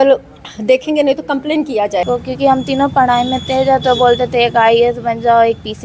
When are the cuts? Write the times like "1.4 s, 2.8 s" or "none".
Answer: 2.0 s